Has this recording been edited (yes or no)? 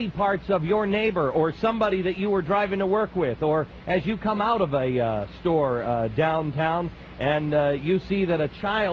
yes